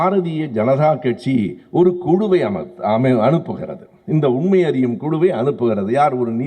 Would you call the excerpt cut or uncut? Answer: uncut